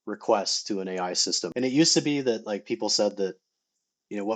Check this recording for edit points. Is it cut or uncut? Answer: cut